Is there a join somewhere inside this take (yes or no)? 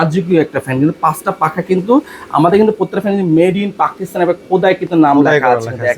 no